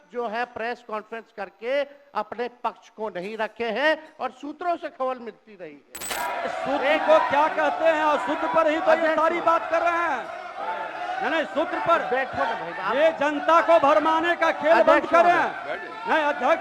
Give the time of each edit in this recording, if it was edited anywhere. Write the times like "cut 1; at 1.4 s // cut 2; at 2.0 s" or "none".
cut 1; at 6.0 s